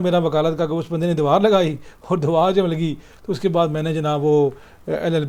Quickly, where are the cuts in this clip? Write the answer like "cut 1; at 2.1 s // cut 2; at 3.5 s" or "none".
none